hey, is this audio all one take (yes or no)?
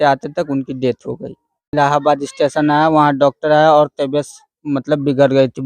no